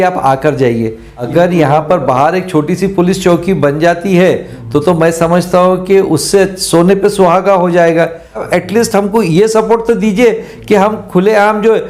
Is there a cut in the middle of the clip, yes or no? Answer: yes